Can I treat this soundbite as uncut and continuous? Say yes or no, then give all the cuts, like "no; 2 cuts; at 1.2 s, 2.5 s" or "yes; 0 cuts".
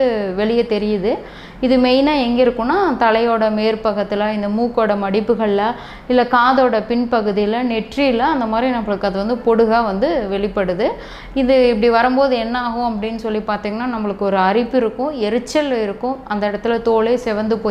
yes; 0 cuts